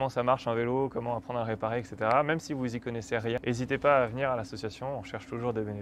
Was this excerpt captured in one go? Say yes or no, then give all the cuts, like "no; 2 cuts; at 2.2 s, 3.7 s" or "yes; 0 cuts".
no; 1 cut; at 3.4 s